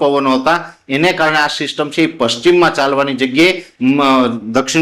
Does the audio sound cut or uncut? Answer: uncut